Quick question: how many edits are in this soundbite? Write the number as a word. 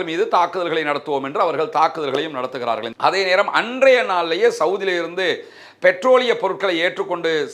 one